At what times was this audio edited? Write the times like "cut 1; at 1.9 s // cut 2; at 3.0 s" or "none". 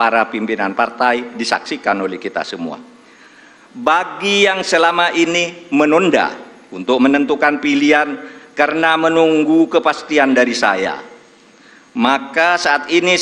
none